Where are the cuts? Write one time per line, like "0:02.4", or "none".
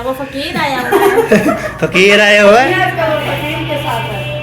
0:02.7